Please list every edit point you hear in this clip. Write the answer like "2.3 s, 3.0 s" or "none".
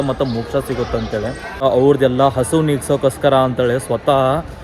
1.6 s